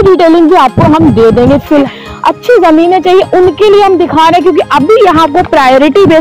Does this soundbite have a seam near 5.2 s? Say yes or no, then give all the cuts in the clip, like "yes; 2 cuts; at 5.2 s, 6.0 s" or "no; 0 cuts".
no; 1 cut; at 1.9 s